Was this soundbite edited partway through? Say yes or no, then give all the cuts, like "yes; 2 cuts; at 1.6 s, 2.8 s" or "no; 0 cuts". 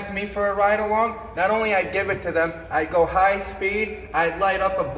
no; 0 cuts